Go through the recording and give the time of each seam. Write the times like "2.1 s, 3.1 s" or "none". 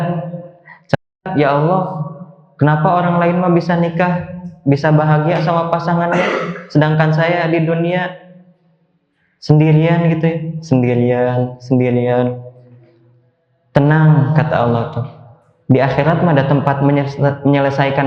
1.3 s